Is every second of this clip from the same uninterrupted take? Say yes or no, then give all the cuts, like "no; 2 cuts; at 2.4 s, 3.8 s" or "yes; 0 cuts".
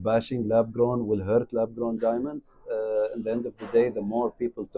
yes; 0 cuts